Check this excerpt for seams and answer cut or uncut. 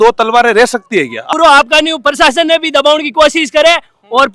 cut